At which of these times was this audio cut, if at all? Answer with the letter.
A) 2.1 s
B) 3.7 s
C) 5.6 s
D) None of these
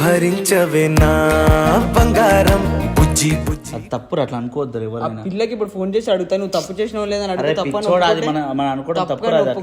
B